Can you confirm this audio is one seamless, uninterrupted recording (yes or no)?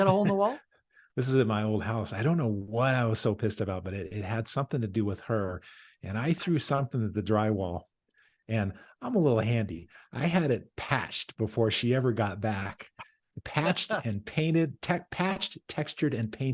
yes